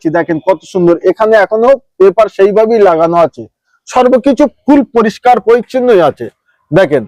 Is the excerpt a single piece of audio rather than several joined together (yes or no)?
yes